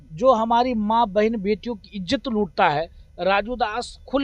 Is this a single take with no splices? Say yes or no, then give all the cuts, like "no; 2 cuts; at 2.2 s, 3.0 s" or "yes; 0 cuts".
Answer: yes; 0 cuts